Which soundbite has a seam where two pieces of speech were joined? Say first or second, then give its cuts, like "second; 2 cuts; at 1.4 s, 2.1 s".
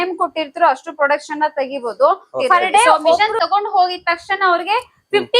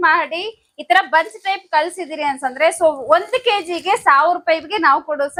first; 1 cut; at 3.2 s